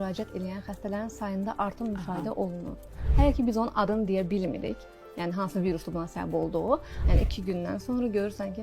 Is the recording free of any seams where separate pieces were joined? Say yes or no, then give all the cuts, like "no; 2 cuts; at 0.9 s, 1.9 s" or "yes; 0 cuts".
no; 2 cuts; at 3.0 s, 6.9 s